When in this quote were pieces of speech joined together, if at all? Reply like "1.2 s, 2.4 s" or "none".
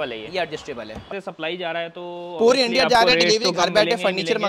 1.1 s